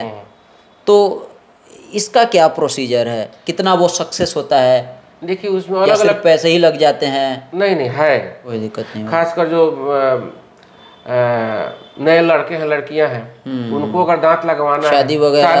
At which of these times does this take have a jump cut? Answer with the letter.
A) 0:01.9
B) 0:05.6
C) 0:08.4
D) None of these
C